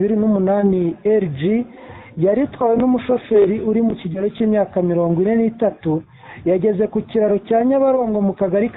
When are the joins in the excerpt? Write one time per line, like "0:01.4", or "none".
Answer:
none